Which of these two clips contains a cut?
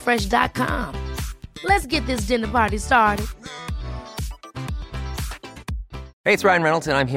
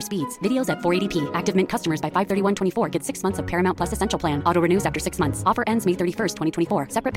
first; 1 cut; at 6.1 s

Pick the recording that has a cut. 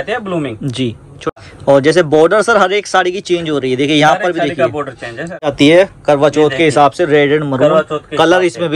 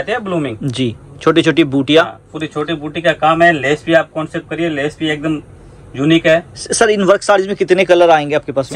first; 2 cuts; at 1.3 s, 5.5 s

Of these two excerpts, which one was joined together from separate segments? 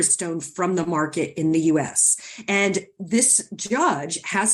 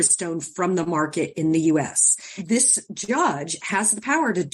second; 1 cut; at 2.3 s

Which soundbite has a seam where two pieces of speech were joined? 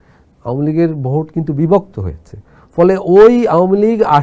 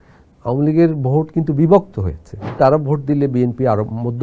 second; 1 cut; at 2.6 s

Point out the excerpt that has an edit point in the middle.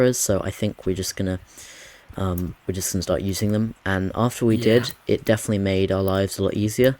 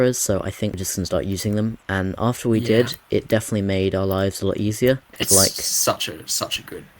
second; 2 cuts; at 0.8 s, 5.1 s

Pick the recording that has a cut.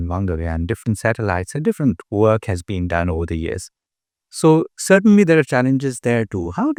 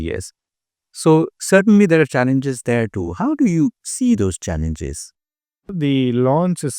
second; 1 cut; at 5.7 s

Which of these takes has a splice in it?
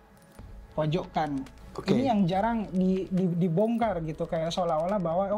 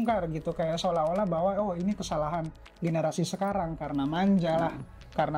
first; 1 cut; at 1.6 s

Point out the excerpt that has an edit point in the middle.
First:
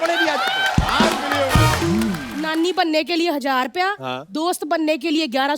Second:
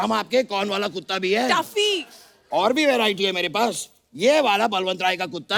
first; 1 cut; at 2.3 s

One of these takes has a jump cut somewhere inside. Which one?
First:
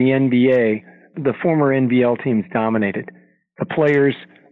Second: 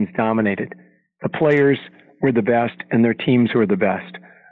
first; 1 cut; at 1.1 s

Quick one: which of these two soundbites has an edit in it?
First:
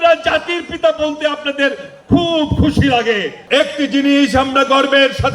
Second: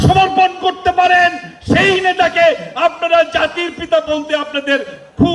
first; 1 cut; at 3.3 s

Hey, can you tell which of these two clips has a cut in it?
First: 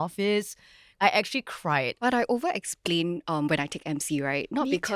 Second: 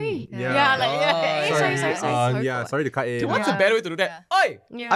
first; 1 cut; at 1.9 s

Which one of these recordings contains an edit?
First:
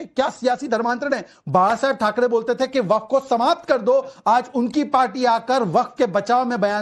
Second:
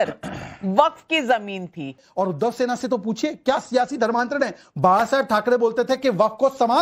second; 1 cut; at 2.0 s

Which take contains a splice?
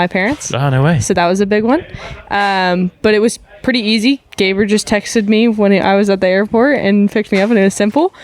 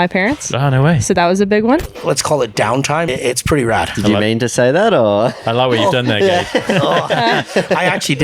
second; 2 cuts; at 1.9 s, 3.1 s

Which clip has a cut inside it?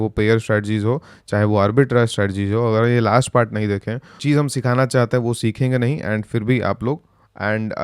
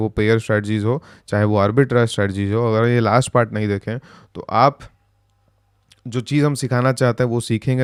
first; 1 cut; at 4.1 s

